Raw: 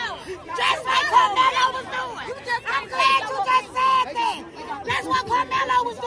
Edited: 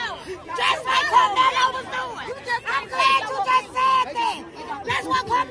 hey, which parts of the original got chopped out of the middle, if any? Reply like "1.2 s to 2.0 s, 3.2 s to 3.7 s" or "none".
none